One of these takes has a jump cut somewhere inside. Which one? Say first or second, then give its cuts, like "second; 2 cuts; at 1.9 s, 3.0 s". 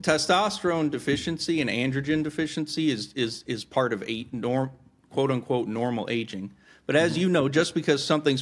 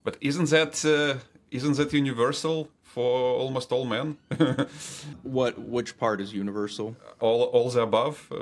second; 2 cuts; at 5.0 s, 7.2 s